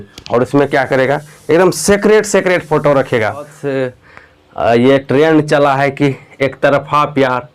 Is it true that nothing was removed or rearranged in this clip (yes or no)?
no